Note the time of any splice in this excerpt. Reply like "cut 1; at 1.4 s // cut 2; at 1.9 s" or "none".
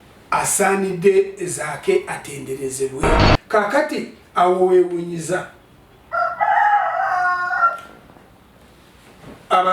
cut 1; at 3.3 s